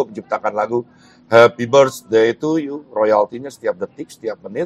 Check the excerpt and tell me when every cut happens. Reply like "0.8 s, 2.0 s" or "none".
none